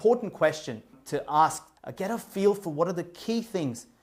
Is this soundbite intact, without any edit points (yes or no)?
no